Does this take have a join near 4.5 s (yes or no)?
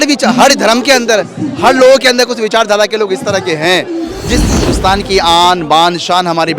yes